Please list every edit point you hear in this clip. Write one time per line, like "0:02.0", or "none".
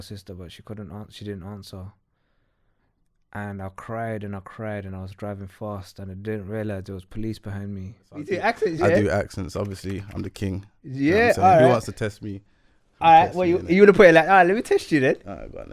0:08.3